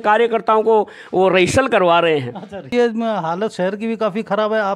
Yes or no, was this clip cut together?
yes